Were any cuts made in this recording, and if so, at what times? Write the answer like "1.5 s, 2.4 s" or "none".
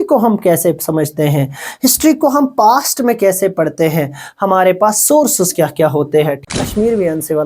6.4 s